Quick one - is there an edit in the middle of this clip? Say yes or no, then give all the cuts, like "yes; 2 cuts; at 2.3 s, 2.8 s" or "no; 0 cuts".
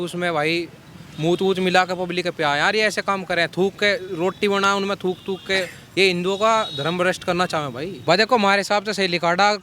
yes; 1 cut; at 7.9 s